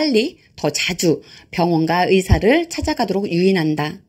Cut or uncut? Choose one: uncut